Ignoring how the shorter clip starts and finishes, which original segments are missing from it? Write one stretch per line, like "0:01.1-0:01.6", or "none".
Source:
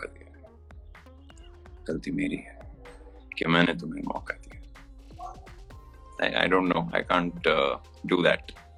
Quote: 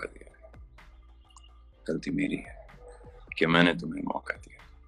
none